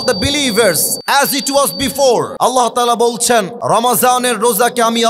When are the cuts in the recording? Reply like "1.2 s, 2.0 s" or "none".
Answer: 0.9 s, 2.3 s, 3.5 s